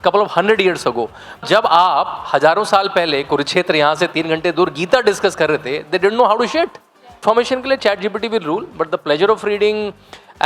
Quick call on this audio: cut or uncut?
cut